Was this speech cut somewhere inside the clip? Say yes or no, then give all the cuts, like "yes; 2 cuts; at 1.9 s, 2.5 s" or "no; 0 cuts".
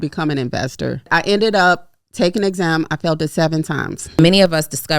yes; 2 cuts; at 1.1 s, 4.2 s